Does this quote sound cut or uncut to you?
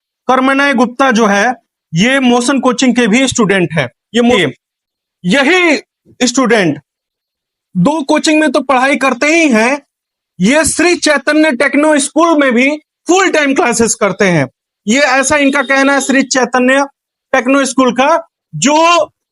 cut